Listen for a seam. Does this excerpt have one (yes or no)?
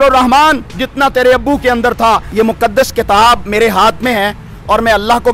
yes